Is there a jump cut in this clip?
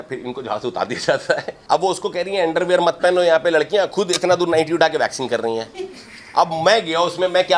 yes; 1 cut; at 1.5 s

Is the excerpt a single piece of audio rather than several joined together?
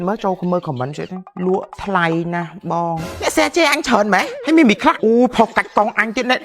no; 4 cuts; at 1.2 s, 3.0 s, 4.3 s, 5.0 s

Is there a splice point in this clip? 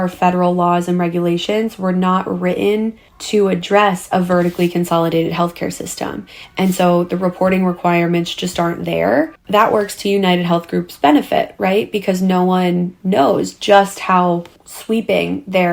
no; 0 cuts

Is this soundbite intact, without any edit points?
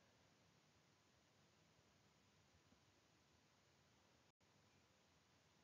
no; 1 cut; at 2.8 s

